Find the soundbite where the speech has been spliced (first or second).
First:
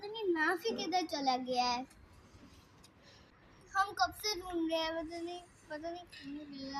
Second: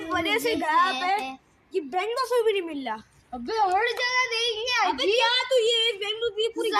first